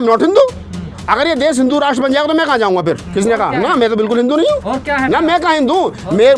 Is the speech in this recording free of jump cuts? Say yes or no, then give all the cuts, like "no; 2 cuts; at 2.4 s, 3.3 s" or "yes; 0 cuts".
no; 1 cut; at 3.1 s